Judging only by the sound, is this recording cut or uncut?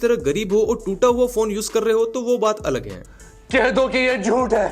uncut